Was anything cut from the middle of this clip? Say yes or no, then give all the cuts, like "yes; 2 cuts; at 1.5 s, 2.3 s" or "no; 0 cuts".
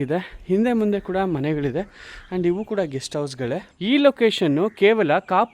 yes; 1 cut; at 3.7 s